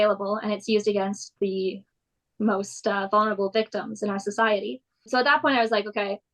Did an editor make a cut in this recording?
yes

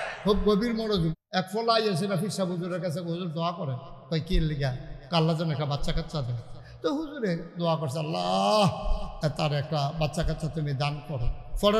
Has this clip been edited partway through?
yes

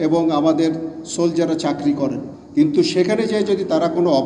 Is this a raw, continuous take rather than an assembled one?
no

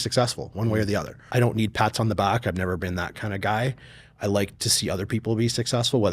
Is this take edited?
yes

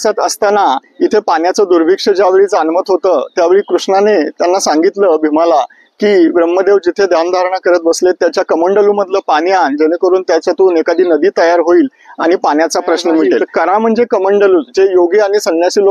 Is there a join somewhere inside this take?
yes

